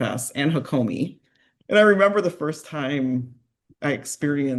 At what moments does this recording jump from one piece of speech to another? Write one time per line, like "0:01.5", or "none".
0:01.7